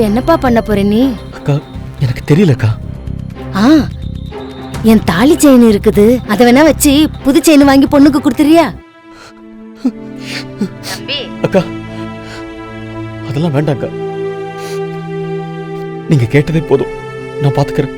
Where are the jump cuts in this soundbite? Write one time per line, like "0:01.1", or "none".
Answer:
0:01.3
0:02.8
0:08.8
0:10.1

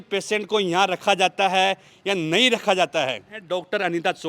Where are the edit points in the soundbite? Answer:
0:03.4

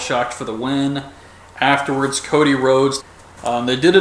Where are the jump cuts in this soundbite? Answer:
none

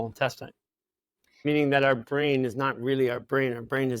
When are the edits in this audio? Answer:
0:01.3

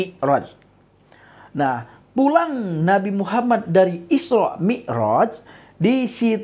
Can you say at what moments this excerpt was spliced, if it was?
none

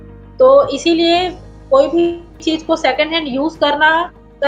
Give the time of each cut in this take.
0:02.3

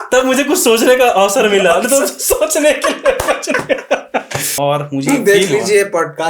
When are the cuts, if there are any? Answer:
0:04.5

